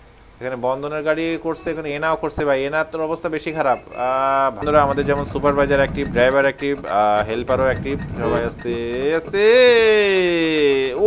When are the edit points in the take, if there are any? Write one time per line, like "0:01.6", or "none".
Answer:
0:04.6